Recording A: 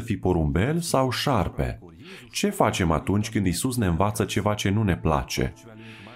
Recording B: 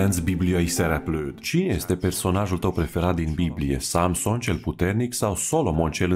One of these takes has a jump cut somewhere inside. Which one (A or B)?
B